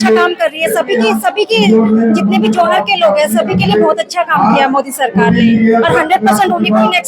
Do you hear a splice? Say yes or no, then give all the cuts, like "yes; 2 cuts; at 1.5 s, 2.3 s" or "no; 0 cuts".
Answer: no; 0 cuts